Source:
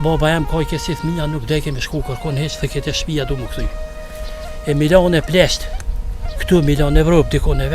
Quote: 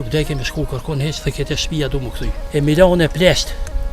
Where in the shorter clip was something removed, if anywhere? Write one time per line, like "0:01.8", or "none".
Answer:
0:02.4